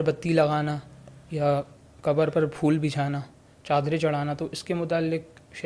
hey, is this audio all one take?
yes; 0 cuts

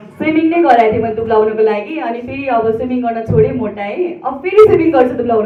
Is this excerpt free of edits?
yes; 0 cuts

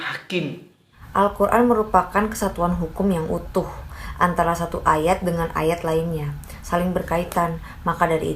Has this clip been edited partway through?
yes; 1 cut; at 1.0 s

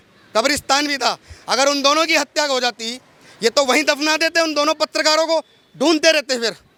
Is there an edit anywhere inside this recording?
no; 0 cuts

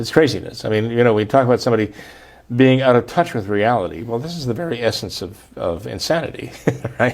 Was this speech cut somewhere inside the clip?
no; 0 cuts

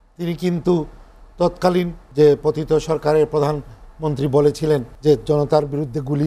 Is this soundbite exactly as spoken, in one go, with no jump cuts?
no; 2 cuts; at 2.0 s, 4.9 s

